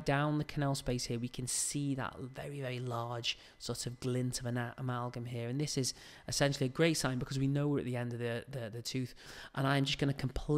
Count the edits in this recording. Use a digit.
1